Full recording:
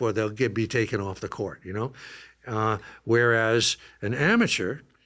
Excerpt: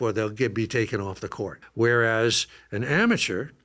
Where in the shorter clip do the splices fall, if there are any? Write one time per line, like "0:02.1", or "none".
0:01.6